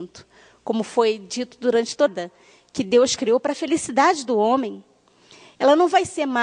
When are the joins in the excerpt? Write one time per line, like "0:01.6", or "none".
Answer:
none

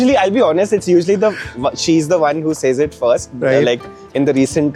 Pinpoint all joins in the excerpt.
none

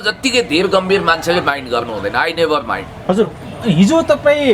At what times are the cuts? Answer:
none

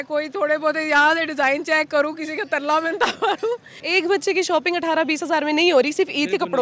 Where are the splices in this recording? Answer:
0:03.8

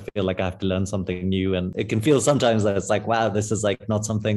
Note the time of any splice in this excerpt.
0:01.7

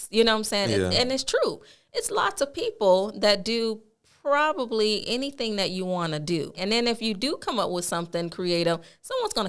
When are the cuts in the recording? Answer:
0:06.6

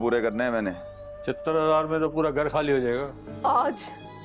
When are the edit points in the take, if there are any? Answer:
0:03.2

